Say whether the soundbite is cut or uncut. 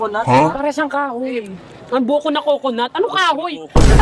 uncut